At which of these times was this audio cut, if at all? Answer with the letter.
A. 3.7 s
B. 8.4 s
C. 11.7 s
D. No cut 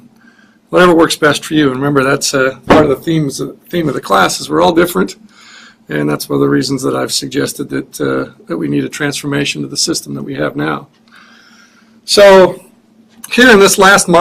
B